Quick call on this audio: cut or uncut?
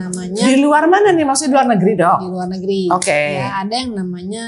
uncut